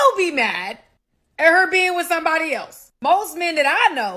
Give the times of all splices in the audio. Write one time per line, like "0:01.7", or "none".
none